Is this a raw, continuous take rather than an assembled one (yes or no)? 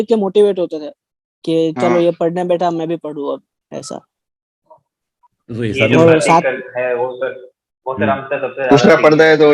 yes